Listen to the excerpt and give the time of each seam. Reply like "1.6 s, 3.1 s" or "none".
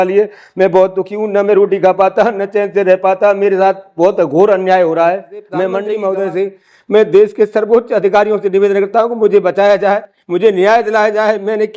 5.8 s